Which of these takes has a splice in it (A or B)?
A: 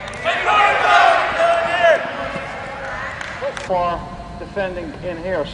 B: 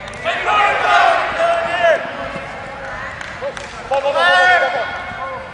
B